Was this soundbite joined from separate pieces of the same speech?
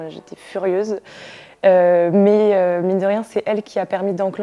no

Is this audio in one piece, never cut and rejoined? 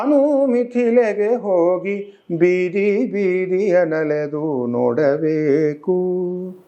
yes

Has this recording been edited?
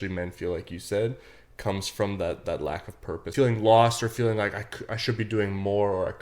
yes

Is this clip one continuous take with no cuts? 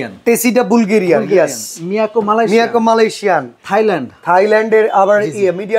yes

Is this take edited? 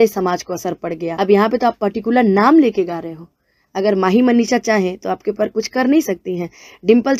yes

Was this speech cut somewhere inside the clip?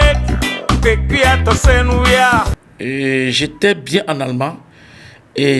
yes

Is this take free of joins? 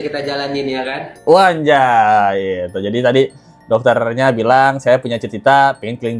yes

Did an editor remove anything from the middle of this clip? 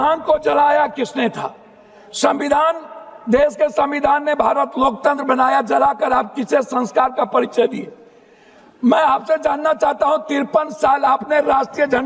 no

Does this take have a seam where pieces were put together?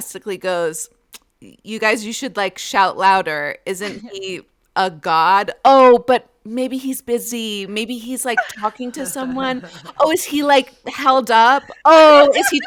no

